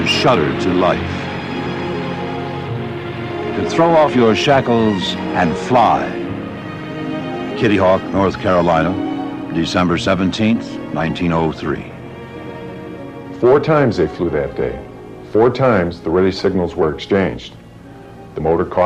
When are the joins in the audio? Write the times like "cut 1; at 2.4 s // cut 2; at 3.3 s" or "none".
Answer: cut 1; at 10.8 s